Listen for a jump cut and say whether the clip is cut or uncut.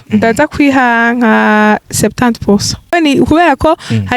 cut